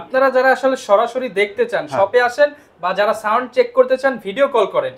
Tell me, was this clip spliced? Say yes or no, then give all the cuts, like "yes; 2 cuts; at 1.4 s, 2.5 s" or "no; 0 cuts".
no; 0 cuts